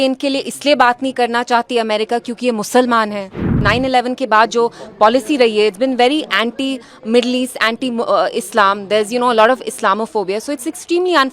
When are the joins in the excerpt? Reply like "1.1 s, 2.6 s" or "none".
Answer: 3.6 s